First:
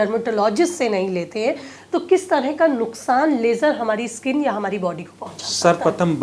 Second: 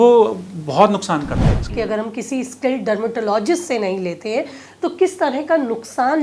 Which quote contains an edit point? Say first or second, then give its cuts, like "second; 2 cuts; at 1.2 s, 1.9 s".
second; 1 cut; at 1.7 s